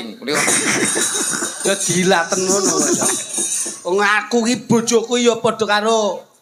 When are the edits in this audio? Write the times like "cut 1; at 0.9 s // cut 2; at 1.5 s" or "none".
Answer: none